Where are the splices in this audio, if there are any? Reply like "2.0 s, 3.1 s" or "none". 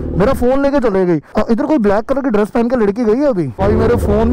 1.3 s, 3.6 s

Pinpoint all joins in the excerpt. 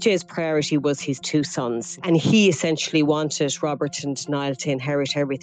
1.9 s

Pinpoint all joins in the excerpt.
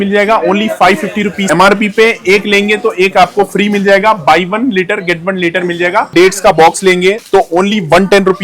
1.5 s, 6.1 s

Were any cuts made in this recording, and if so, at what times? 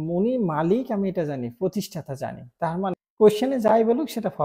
2.9 s

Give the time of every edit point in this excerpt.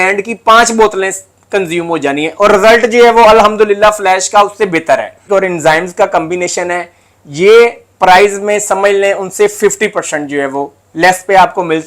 5.2 s

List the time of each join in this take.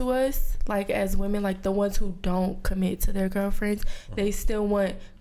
none

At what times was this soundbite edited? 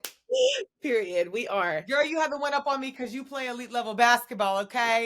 1.8 s

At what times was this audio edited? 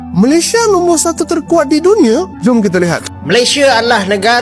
3.1 s

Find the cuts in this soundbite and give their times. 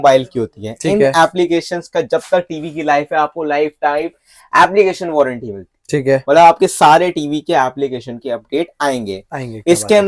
none

